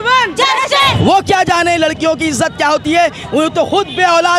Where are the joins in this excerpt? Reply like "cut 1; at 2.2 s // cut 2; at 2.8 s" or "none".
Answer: cut 1; at 1.0 s

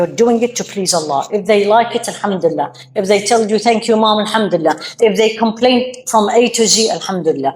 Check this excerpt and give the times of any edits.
none

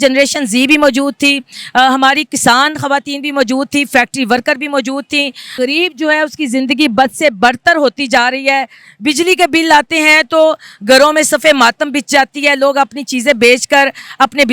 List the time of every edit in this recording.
cut 1; at 5.5 s

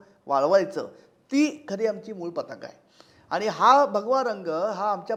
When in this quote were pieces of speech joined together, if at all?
none

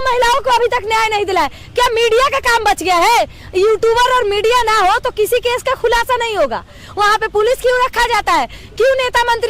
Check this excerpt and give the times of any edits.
none

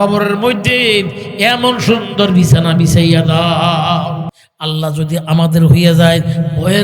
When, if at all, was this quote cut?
cut 1; at 4.4 s

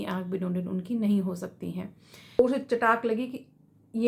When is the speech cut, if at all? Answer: cut 1; at 2.4 s

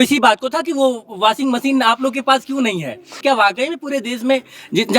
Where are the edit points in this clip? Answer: cut 1; at 3.2 s

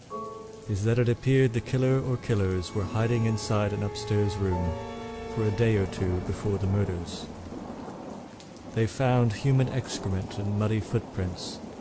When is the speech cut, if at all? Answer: none

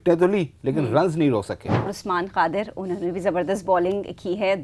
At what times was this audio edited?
cut 1; at 1.9 s

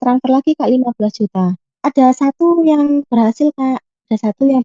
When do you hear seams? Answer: cut 1; at 1.8 s

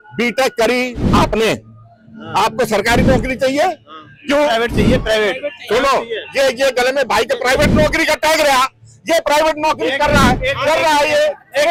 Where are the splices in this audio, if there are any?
none

